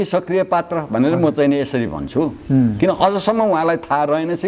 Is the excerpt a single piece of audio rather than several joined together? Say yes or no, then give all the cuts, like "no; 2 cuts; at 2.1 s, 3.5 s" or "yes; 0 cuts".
yes; 0 cuts